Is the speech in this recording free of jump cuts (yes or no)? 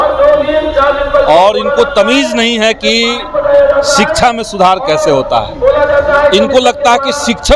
yes